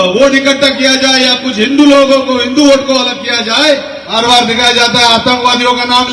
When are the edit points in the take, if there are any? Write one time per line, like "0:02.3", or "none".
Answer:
0:04.0